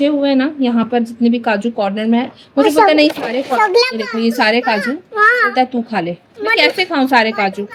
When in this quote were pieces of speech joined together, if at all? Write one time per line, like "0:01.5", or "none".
none